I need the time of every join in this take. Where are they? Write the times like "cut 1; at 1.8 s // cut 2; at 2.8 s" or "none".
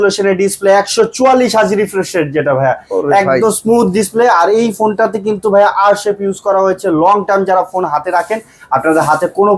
none